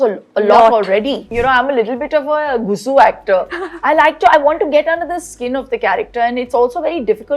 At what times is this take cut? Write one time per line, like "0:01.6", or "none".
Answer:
0:01.3